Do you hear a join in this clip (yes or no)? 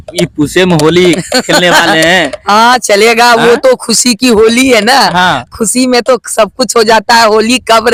no